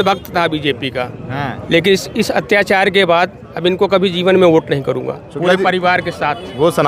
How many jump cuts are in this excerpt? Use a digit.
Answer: 0